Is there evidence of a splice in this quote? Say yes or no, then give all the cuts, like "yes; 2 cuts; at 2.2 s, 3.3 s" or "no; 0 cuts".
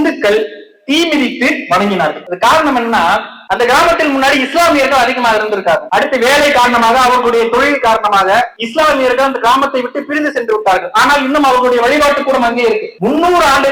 no; 0 cuts